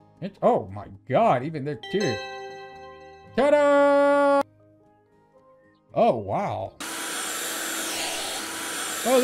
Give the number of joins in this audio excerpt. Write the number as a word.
one